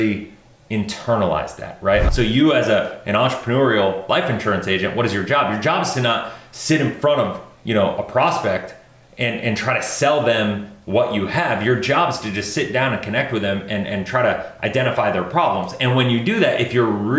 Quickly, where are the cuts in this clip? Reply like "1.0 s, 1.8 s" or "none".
2.0 s